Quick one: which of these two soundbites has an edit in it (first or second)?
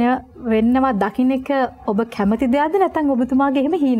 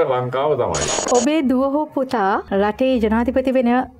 second